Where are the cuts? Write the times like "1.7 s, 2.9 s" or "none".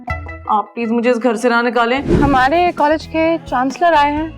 2.1 s